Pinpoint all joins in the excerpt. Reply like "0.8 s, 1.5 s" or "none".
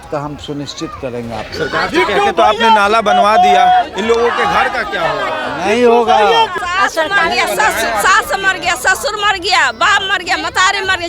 6.6 s